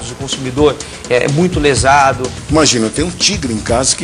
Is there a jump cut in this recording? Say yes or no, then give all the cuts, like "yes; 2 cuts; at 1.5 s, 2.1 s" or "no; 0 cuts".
yes; 1 cut; at 2.3 s